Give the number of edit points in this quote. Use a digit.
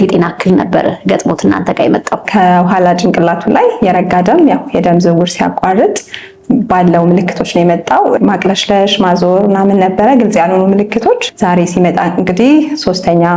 3